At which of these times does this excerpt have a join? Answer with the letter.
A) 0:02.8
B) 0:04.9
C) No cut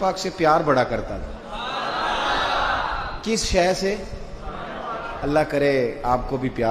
C